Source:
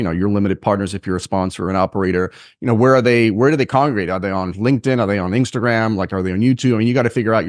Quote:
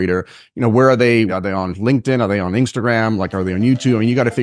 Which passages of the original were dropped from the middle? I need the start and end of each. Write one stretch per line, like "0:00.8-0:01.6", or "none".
0:03.3-0:04.1